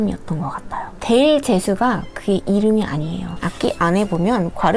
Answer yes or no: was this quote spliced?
yes